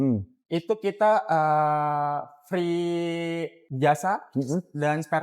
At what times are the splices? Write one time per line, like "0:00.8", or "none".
0:03.6